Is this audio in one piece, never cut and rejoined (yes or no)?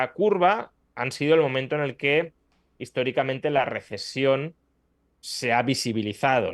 yes